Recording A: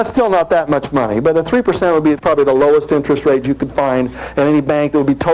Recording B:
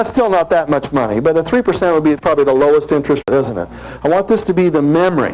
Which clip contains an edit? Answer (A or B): A